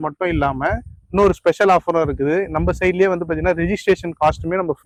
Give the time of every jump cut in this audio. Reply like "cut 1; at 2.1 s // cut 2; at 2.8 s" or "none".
none